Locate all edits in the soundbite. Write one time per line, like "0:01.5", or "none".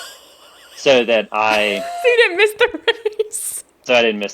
0:01.8